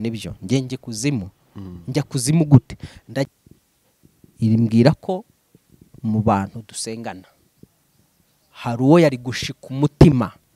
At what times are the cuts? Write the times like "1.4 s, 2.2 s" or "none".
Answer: 3.3 s